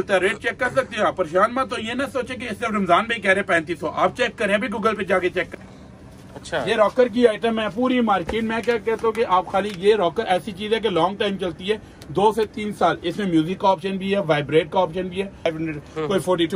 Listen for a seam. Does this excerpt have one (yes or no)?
yes